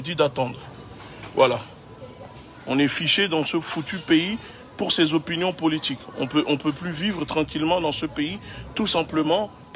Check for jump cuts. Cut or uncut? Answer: uncut